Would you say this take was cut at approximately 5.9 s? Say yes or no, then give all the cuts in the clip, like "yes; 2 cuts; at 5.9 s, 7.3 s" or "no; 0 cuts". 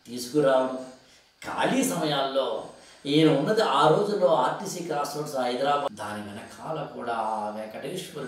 yes; 1 cut; at 5.9 s